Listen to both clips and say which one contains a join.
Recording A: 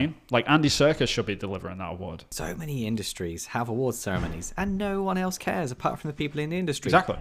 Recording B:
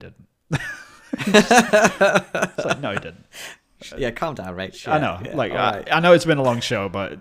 A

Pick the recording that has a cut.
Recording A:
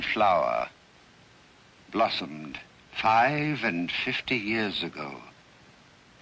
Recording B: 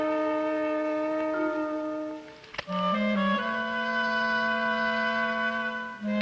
A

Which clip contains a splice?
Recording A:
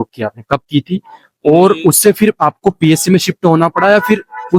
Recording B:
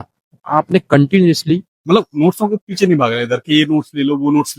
B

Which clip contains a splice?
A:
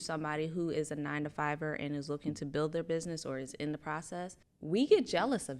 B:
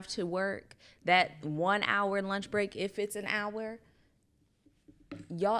A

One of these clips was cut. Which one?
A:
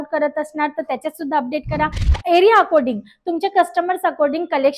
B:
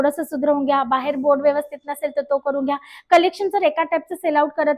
A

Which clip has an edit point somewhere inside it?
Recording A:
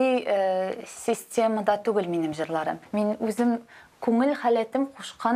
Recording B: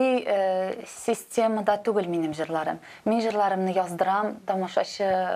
A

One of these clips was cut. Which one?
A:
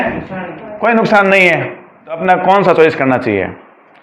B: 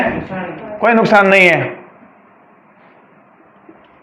A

